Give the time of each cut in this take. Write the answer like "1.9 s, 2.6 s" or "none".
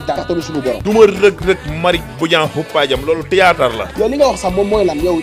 none